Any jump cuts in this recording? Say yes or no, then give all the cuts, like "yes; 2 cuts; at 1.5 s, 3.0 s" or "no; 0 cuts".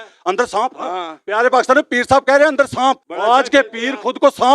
yes; 1 cut; at 3.1 s